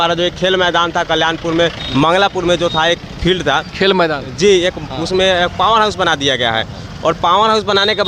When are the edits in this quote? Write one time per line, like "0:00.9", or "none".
none